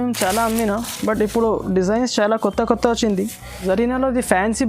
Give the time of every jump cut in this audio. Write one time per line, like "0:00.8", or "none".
0:03.5